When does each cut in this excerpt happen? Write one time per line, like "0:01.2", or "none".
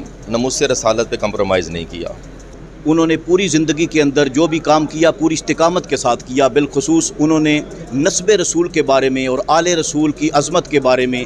0:02.6